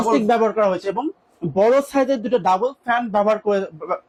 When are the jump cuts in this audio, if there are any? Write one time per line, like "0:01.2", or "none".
none